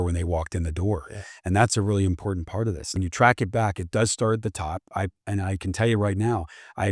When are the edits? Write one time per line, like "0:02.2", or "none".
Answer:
0:02.9